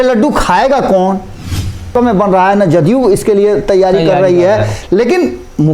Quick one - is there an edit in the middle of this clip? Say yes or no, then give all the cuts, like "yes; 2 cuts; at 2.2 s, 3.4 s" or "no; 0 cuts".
yes; 1 cut; at 1.9 s